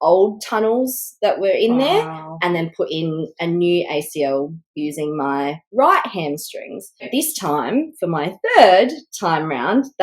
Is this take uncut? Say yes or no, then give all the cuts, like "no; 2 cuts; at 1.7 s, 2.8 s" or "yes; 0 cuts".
no; 1 cut; at 7.1 s